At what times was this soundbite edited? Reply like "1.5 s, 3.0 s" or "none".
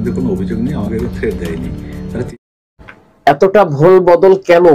2.1 s

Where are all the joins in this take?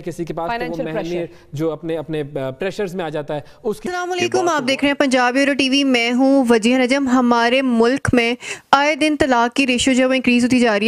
none

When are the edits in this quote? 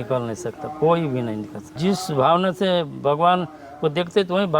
1.6 s

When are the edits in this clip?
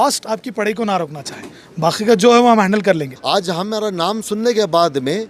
3.1 s

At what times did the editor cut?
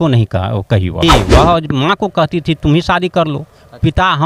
1.0 s

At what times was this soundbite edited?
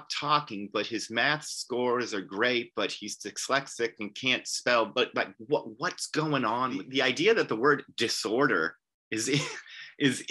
6.8 s

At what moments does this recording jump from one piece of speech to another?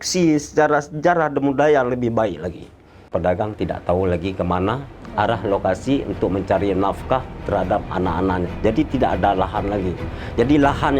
3.1 s

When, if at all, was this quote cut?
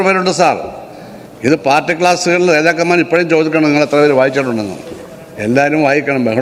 none

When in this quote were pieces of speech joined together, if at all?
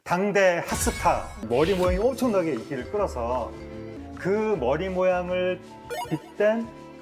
1.4 s, 3.9 s

